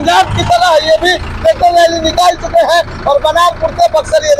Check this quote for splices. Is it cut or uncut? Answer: uncut